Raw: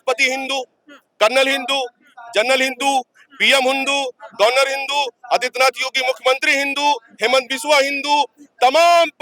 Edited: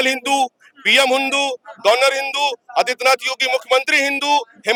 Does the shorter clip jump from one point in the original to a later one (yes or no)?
no